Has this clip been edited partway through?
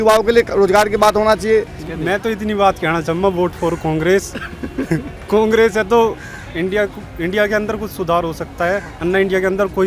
yes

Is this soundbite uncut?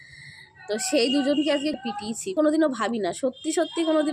no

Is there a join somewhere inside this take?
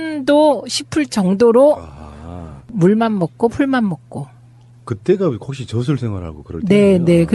no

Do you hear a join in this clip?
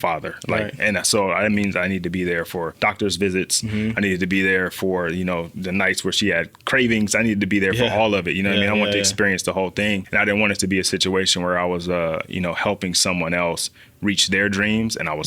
yes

